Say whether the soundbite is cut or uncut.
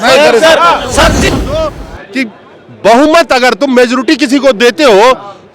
cut